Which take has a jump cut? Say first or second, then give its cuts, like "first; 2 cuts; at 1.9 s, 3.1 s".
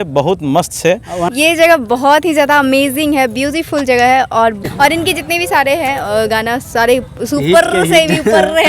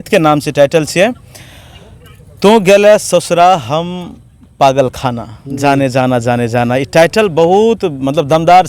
first; 2 cuts; at 1.3 s, 4.6 s